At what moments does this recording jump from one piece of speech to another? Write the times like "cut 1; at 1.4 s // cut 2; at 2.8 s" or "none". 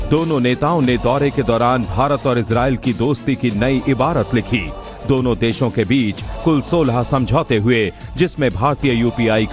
cut 1; at 3.6 s